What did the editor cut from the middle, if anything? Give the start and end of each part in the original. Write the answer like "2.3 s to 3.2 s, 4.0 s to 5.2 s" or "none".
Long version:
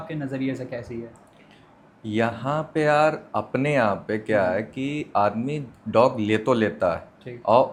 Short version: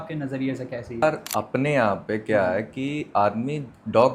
1.0 s to 3.0 s